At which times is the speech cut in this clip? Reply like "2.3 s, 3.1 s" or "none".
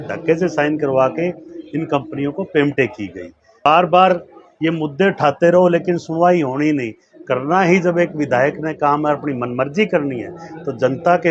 3.7 s